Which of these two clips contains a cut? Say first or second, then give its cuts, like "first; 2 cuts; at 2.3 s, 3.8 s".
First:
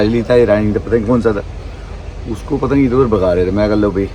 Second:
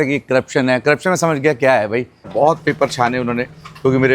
second; 1 cut; at 2.3 s